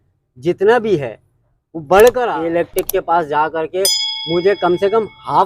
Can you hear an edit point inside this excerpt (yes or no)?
yes